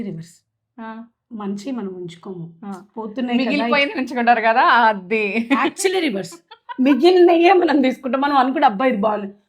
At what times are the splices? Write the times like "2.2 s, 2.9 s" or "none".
none